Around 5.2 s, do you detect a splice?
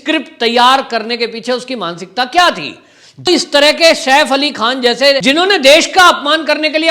yes; 2 cuts; at 3.3 s, 5.2 s

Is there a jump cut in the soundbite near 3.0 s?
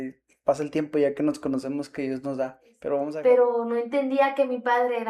yes; 1 cut; at 3.0 s

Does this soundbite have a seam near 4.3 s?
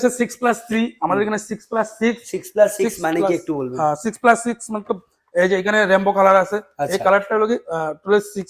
no; 0 cuts

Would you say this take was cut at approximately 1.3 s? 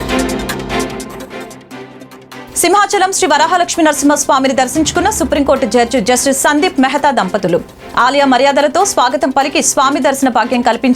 yes; 2 cuts; at 1.3 s, 2.0 s

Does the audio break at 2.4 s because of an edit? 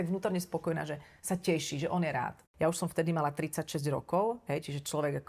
yes; 1 cut; at 2.4 s

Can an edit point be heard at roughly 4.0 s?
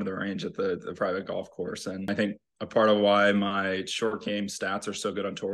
no; 1 cut; at 2.1 s

